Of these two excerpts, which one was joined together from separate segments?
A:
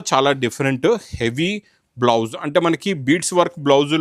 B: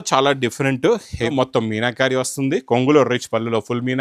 B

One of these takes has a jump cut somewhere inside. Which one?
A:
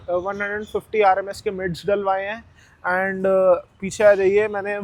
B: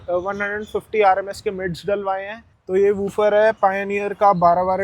B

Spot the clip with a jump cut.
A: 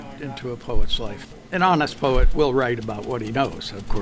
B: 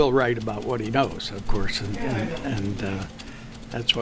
A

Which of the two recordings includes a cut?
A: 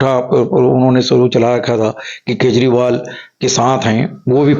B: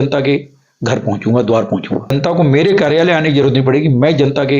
B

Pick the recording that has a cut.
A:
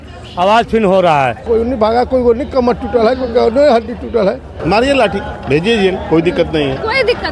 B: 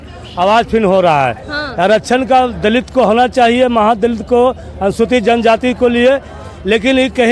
A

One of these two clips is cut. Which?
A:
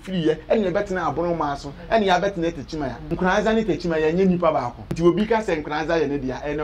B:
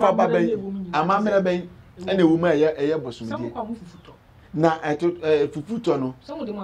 A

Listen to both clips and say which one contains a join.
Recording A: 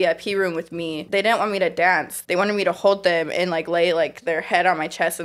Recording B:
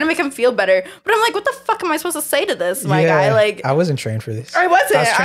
A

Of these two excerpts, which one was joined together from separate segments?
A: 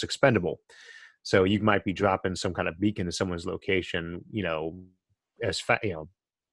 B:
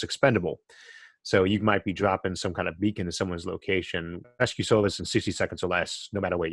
B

